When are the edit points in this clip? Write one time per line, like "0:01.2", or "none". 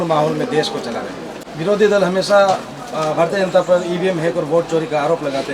0:01.5